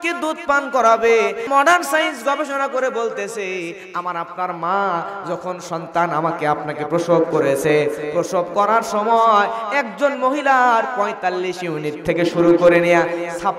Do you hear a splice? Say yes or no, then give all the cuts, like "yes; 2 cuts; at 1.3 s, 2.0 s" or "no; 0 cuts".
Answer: yes; 1 cut; at 1.4 s